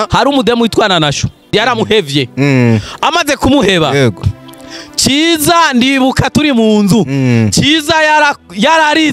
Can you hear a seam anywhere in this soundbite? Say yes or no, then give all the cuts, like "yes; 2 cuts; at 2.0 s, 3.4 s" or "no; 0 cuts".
yes; 1 cut; at 1.5 s